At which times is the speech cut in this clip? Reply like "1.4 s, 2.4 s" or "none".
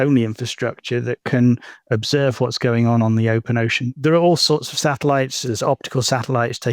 3.8 s, 5.5 s